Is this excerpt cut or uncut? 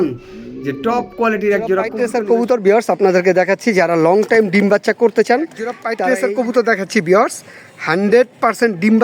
cut